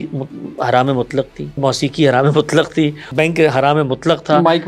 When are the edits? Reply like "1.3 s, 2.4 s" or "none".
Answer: 1.6 s, 3.1 s